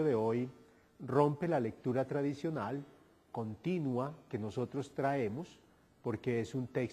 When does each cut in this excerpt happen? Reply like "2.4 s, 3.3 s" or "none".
2.0 s